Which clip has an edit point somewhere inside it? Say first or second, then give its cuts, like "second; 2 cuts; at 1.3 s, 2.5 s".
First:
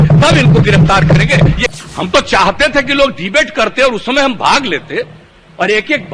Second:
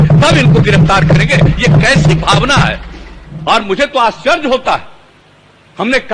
first; 1 cut; at 1.6 s